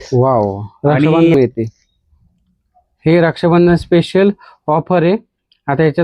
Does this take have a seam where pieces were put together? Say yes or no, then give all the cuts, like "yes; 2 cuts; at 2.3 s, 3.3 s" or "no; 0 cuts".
yes; 1 cut; at 1.3 s